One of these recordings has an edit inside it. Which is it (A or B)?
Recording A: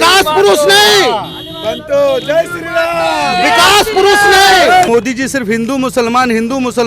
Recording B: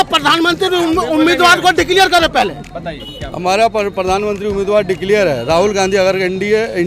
A